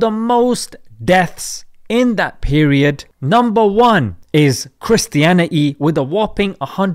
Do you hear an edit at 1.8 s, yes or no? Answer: no